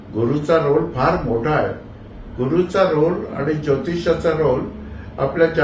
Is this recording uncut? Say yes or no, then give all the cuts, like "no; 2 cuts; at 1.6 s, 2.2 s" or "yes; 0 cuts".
yes; 0 cuts